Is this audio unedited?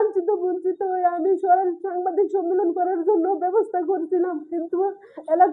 yes; 0 cuts

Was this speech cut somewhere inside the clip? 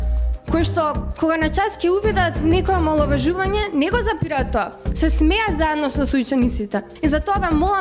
yes; 1 cut; at 6.9 s

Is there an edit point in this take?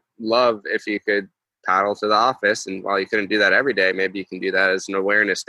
no; 0 cuts

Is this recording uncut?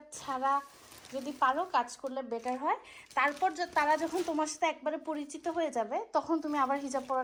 yes; 0 cuts

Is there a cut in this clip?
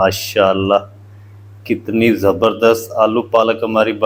no; 0 cuts

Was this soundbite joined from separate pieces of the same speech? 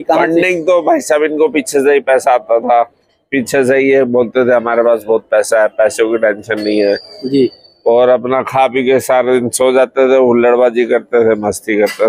no; 0 cuts

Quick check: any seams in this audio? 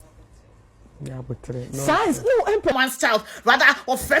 yes; 1 cut; at 2.8 s

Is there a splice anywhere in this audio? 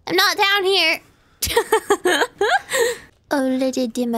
yes; 1 cut; at 3.1 s

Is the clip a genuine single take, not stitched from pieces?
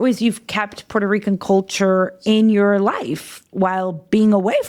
yes; 0 cuts

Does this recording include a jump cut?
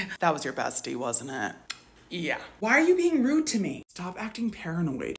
yes; 1 cut; at 2.5 s

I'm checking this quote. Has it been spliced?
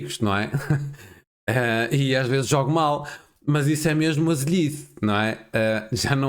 no; 0 cuts

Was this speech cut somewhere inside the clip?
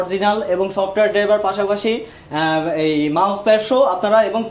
no; 0 cuts

